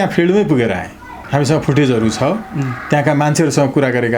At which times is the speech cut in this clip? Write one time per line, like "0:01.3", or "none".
0:01.2